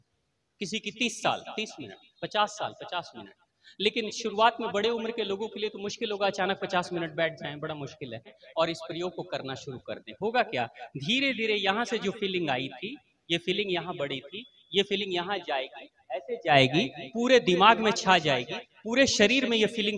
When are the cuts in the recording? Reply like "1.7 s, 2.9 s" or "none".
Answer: 8.4 s